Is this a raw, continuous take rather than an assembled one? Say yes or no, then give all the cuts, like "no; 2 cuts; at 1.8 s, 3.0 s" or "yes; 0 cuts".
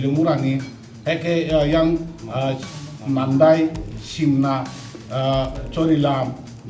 yes; 0 cuts